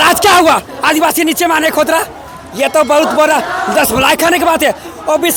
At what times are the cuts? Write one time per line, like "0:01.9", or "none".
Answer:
none